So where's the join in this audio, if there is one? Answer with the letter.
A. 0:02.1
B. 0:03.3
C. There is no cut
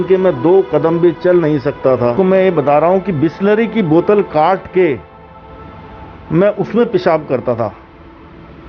A